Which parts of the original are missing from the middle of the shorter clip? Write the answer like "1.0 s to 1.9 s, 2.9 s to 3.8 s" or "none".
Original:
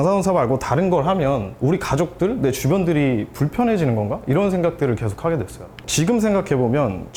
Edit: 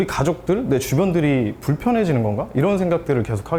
none